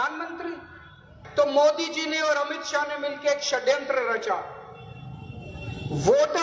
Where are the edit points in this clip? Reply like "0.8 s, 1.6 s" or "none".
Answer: 1.2 s